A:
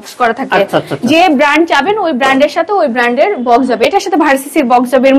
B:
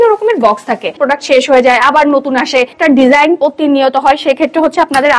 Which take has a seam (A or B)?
B